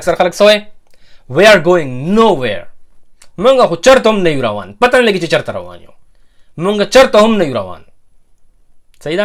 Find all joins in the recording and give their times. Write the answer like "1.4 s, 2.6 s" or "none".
none

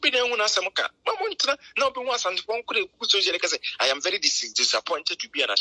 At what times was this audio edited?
none

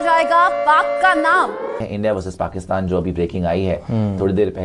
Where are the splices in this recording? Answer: 1.8 s

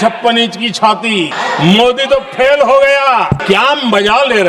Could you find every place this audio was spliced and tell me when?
1.4 s, 3.4 s

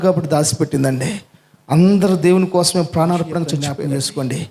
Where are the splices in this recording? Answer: 3.6 s

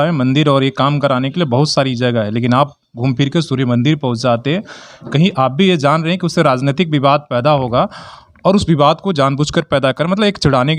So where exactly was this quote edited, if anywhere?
none

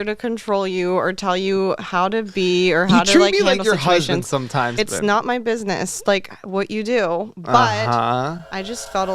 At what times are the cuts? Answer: 4.7 s

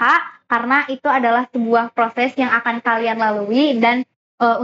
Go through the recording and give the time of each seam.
none

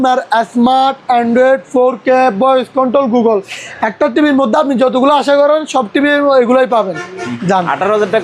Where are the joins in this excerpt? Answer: 7.3 s

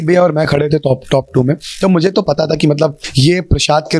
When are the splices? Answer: 3.1 s

